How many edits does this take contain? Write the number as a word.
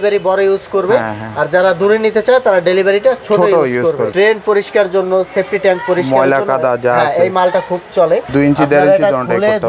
two